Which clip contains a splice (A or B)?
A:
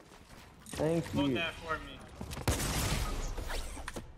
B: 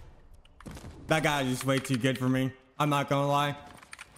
B